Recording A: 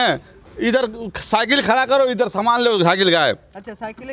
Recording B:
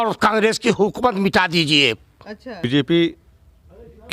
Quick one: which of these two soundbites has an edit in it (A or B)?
B